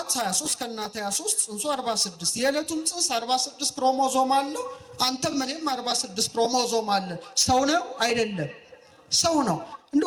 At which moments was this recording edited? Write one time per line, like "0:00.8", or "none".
none